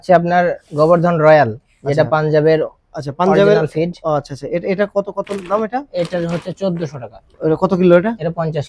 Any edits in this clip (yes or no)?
no